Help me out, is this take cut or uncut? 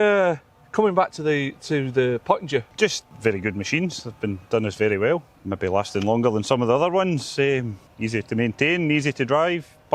cut